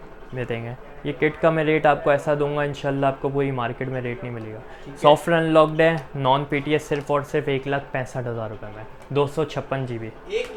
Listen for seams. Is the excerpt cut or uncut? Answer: uncut